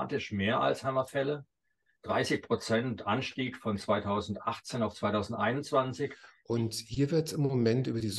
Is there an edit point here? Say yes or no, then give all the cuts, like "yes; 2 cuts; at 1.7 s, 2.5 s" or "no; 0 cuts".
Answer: yes; 1 cut; at 6.3 s